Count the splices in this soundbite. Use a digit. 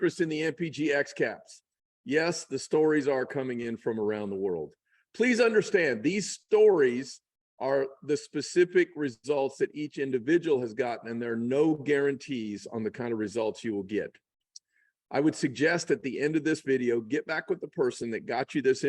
0